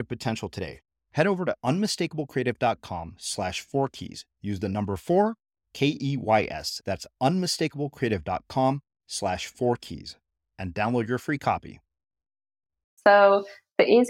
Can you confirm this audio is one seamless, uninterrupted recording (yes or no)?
no